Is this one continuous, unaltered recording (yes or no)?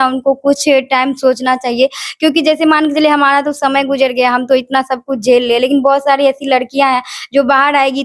yes